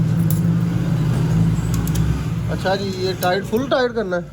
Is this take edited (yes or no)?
no